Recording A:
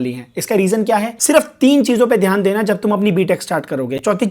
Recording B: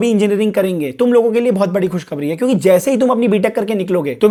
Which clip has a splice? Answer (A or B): A